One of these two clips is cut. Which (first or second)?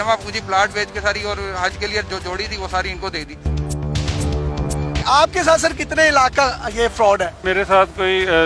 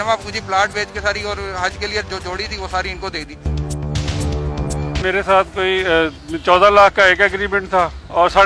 second